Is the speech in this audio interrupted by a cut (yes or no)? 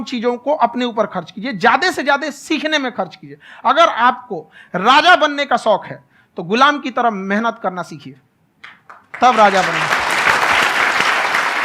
no